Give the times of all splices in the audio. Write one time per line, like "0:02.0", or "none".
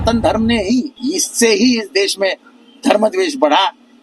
0:00.9